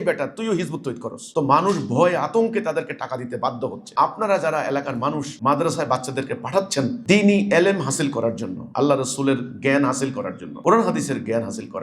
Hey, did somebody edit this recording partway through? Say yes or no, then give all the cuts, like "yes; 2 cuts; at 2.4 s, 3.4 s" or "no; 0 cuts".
yes; 1 cut; at 3.9 s